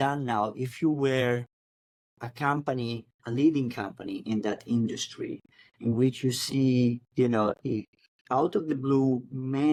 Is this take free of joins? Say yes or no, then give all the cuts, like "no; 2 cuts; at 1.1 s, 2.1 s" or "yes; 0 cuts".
yes; 0 cuts